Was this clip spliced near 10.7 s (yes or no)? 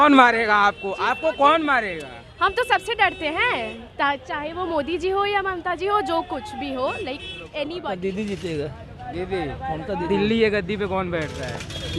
no